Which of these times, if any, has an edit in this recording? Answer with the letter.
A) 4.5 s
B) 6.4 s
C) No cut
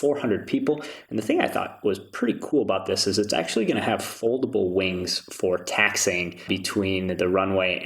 B